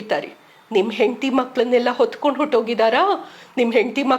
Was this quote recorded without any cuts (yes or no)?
yes